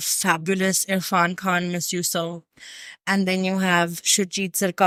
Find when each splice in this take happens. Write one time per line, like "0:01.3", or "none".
none